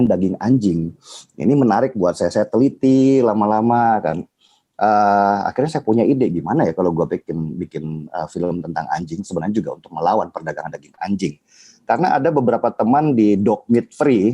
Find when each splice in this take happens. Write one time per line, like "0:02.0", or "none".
none